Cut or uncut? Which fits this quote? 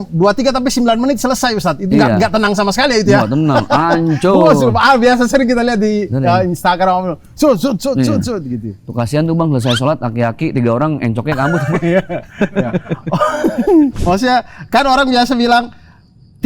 cut